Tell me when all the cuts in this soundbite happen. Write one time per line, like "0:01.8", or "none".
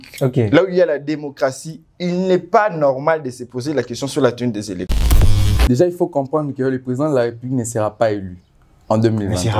0:05.2